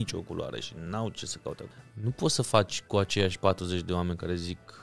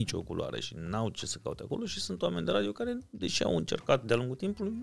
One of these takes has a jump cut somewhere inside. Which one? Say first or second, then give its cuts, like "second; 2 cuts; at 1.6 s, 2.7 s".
first; 1 cut; at 1.6 s